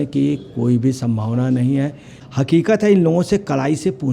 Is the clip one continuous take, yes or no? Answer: no